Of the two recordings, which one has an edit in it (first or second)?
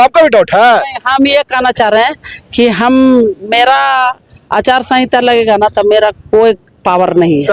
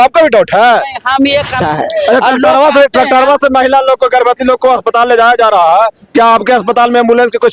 second